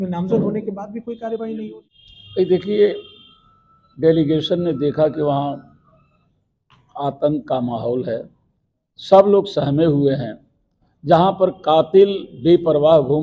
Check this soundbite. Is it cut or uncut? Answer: cut